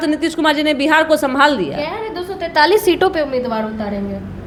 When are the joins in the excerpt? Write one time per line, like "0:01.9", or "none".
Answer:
none